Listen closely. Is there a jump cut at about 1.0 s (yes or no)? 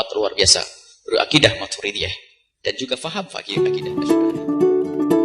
no